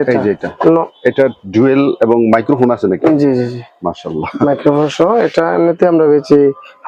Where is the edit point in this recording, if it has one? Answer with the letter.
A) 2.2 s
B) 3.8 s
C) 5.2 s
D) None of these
D